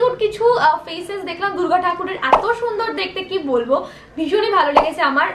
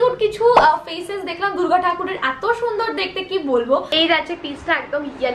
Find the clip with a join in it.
second; 1 cut; at 4.0 s

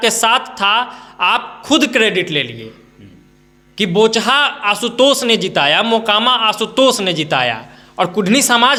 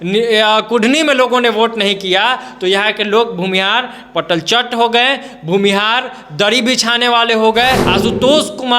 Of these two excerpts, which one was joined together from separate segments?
second; 1 cut; at 7.8 s

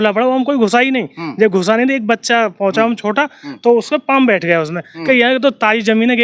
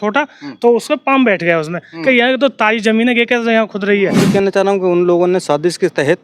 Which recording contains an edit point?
second; 1 cut; at 4.3 s

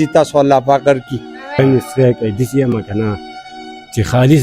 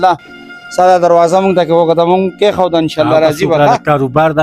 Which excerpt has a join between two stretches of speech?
first; 1 cut; at 1.6 s

